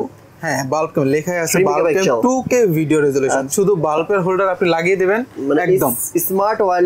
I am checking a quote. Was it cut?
yes; 1 cut; at 3.5 s

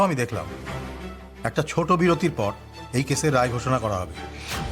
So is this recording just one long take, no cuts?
yes; 0 cuts

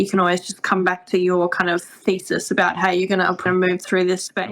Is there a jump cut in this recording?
yes; 1 cut; at 3.5 s

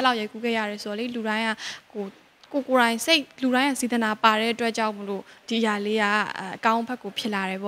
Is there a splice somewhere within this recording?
no; 0 cuts

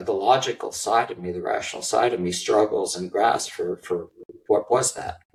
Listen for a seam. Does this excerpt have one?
no; 0 cuts

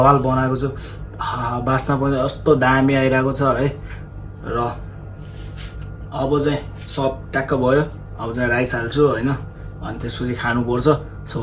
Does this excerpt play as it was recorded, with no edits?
yes; 0 cuts

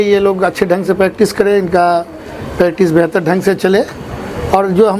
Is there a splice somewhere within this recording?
no; 0 cuts

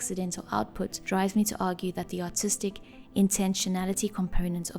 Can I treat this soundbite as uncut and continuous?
yes; 0 cuts

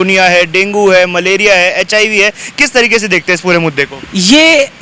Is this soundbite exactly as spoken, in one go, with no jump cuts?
yes; 0 cuts

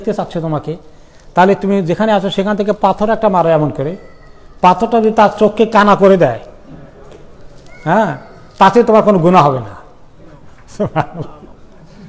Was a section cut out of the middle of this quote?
no; 0 cuts

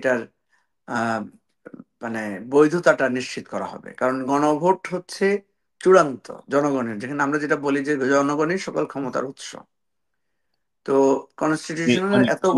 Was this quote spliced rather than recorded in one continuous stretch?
no; 0 cuts

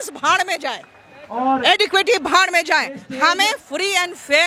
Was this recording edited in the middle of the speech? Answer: no; 0 cuts

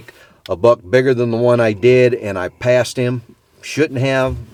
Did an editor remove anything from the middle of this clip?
no; 0 cuts

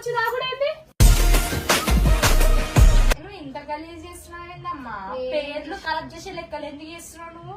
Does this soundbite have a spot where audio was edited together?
yes; 1 cut; at 3.1 s

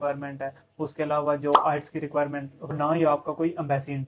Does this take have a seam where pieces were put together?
yes; 1 cut; at 2.8 s

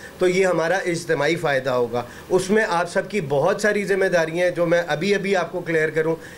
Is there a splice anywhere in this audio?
no; 0 cuts

